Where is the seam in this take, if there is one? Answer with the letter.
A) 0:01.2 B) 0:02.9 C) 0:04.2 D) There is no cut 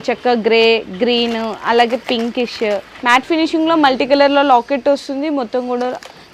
B